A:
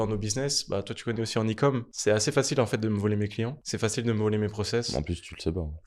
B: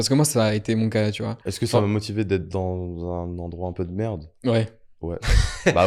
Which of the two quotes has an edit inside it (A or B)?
A